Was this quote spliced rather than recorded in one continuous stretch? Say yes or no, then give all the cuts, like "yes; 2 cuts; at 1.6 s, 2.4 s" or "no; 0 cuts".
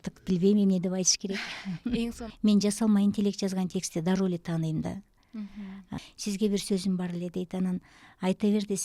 yes; 2 cuts; at 2.2 s, 5.9 s